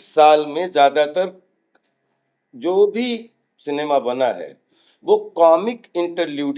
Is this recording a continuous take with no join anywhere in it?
yes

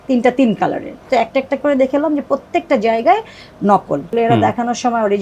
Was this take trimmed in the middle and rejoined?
yes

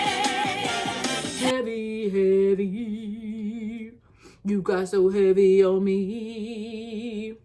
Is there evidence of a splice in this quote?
yes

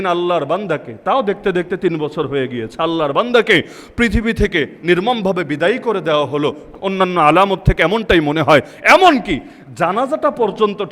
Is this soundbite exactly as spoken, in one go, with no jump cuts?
no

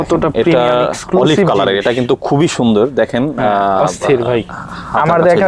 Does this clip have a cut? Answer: no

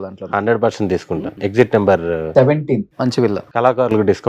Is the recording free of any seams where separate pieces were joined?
no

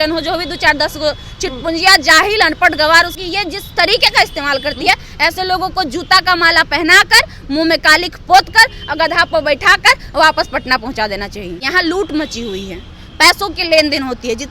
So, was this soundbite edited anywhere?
yes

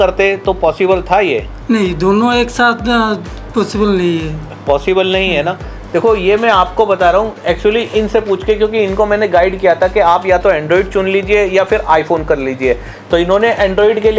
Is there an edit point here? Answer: no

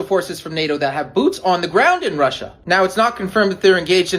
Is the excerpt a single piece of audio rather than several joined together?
no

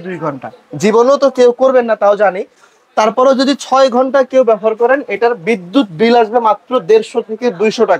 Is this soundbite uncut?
yes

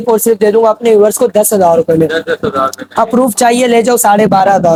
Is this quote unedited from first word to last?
yes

